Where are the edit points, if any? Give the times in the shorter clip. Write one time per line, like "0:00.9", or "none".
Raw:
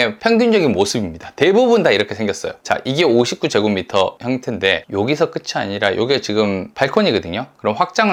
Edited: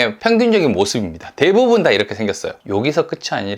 0:02.6